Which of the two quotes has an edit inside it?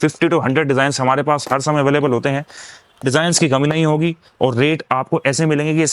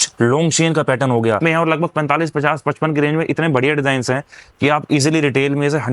second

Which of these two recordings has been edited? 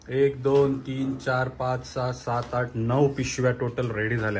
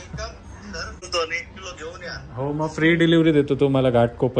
second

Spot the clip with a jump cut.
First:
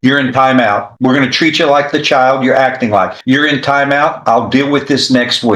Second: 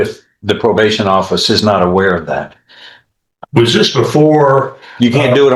first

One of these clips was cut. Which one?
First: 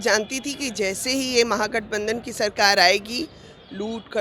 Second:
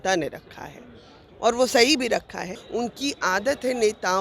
second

